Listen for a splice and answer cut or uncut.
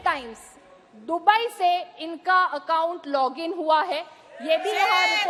uncut